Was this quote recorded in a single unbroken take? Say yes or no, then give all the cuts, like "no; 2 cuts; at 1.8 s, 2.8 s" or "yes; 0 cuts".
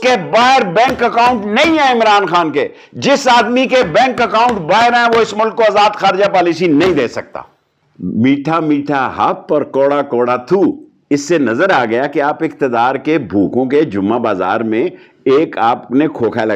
yes; 0 cuts